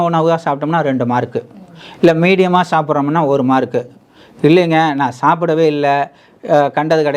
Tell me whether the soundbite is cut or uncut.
uncut